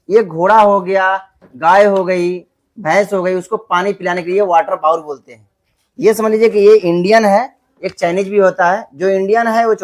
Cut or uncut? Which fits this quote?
uncut